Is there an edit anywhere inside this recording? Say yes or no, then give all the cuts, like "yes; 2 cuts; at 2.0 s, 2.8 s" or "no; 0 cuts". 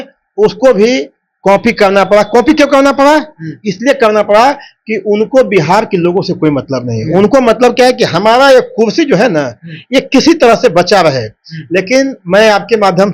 no; 0 cuts